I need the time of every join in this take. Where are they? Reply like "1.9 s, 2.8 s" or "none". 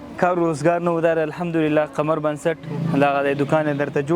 2.7 s